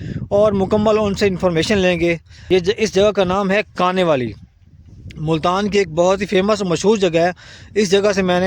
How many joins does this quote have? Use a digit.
1